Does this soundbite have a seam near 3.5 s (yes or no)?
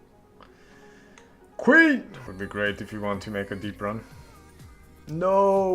no